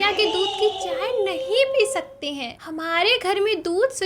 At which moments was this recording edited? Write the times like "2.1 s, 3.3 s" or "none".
2.7 s